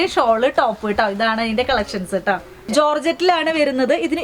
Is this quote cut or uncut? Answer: cut